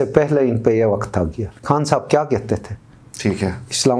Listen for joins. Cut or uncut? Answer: cut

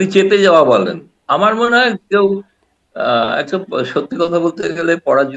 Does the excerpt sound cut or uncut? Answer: uncut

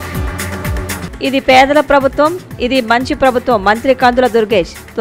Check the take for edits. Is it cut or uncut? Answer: cut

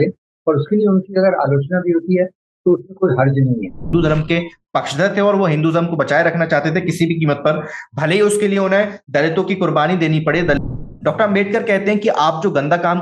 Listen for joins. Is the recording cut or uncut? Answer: cut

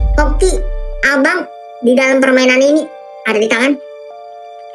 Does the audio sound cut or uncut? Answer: cut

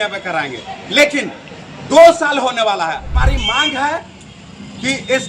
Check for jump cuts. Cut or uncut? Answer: cut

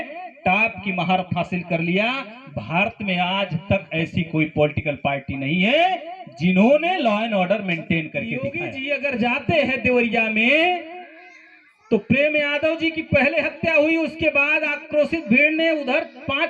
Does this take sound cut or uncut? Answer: cut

